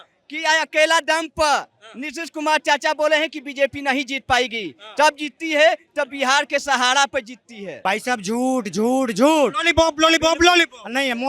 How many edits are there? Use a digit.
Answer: 1